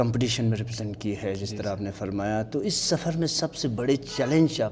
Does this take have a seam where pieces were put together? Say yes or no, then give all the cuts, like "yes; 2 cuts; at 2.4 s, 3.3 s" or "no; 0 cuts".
no; 0 cuts